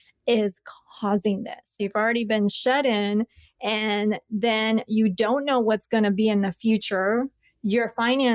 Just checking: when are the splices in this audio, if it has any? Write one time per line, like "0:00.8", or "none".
0:01.8